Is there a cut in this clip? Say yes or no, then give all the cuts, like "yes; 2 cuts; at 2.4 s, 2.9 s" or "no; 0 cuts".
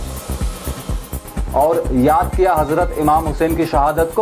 no; 0 cuts